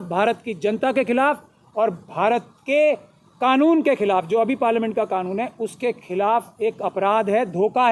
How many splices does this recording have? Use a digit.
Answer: 0